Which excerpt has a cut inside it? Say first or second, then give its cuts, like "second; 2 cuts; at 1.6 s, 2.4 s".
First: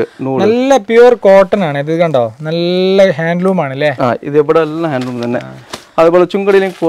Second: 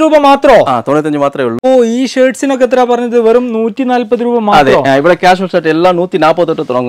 second; 1 cut; at 1.5 s